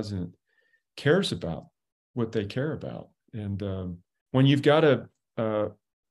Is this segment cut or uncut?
cut